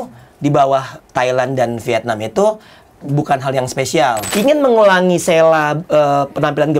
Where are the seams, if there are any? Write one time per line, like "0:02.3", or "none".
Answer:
0:01.0
0:02.9
0:04.2